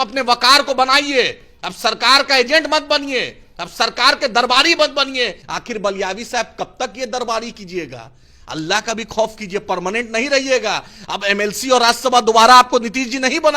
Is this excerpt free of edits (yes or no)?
no